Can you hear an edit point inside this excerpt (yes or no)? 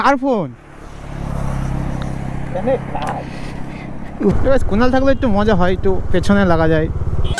yes